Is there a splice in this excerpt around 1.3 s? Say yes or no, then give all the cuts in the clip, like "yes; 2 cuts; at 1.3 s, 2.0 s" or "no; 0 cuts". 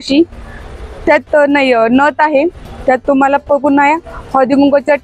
no; 1 cut; at 2.7 s